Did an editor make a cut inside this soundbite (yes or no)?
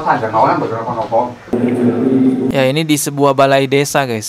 yes